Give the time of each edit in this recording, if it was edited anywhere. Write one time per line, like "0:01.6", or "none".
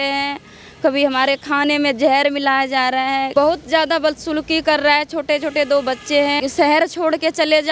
0:03.3
0:06.4